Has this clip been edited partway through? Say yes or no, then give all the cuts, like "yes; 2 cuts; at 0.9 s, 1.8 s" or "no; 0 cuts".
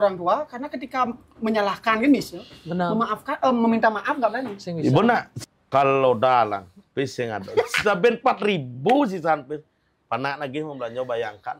yes; 1 cut; at 5.3 s